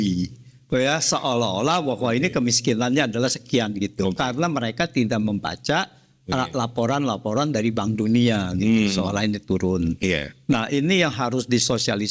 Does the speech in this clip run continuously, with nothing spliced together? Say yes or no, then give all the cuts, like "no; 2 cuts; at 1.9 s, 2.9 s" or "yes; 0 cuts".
yes; 0 cuts